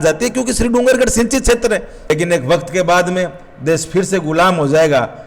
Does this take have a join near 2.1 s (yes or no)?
yes